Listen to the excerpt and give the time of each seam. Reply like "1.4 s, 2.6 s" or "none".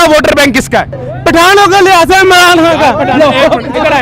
1.0 s